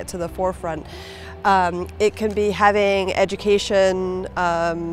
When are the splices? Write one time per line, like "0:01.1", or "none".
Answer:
none